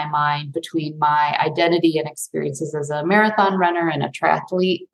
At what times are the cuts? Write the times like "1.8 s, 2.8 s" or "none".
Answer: none